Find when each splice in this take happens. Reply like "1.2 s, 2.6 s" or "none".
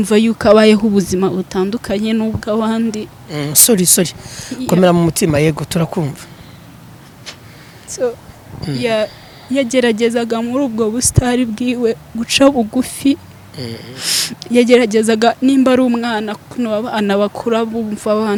none